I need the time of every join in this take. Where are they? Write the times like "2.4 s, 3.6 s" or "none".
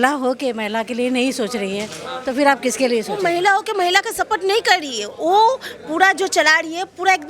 3.1 s